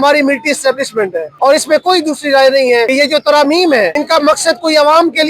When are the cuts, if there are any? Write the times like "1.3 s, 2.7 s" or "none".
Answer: 1.2 s, 2.9 s, 4.0 s